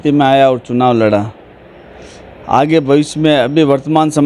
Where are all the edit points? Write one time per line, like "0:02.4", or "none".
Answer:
none